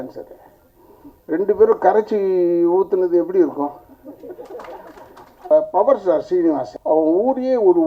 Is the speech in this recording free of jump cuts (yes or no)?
no